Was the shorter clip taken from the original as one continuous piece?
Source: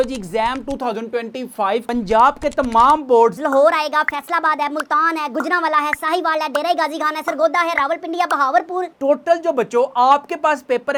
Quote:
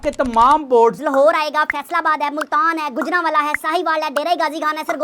yes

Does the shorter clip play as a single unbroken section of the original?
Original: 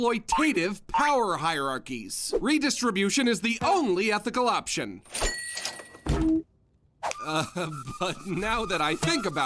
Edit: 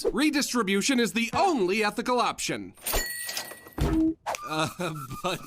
no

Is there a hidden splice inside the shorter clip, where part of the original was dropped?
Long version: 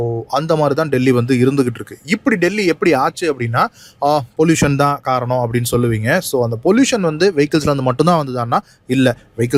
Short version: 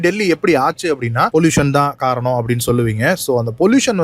yes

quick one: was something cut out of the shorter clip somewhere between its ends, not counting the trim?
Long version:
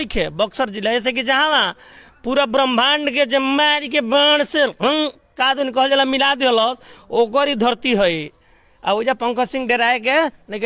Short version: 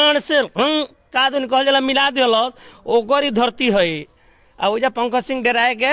no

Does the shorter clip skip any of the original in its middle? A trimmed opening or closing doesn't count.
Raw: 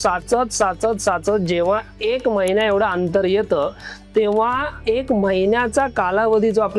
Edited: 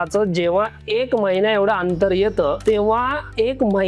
yes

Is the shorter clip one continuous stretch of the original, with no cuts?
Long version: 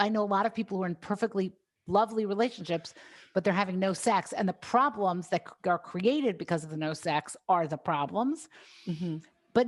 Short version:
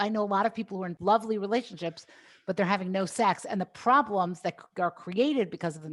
no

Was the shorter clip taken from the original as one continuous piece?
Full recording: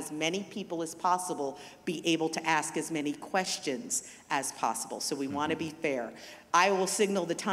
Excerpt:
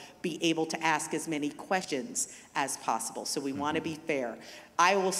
no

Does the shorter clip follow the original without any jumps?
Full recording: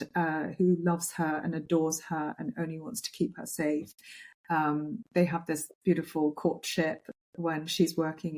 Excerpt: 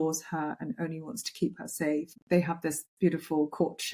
no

